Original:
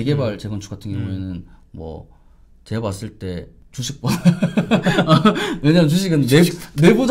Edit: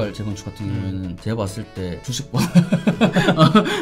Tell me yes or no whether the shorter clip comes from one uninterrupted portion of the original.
no